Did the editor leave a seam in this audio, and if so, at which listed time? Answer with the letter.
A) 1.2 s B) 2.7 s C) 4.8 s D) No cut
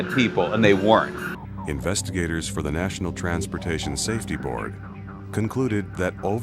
D